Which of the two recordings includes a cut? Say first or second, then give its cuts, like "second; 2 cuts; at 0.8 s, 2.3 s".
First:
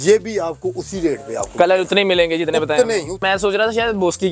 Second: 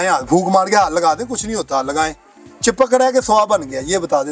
first; 1 cut; at 3.2 s